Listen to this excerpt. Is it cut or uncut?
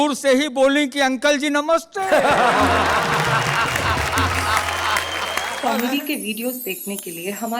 cut